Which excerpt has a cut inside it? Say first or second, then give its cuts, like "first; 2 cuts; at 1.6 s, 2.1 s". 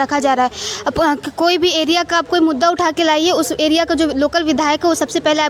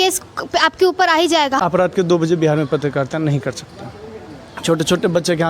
second; 1 cut; at 1.6 s